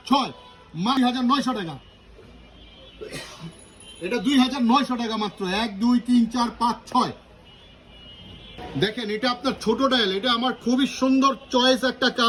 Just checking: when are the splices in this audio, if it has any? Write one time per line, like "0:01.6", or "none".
none